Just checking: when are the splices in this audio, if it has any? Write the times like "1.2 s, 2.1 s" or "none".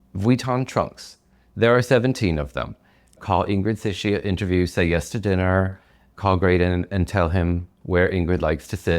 3.2 s